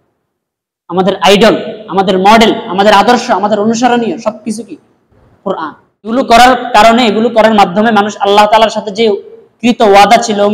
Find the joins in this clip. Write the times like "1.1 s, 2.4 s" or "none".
6.1 s